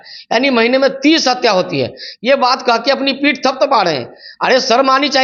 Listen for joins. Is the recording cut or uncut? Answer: uncut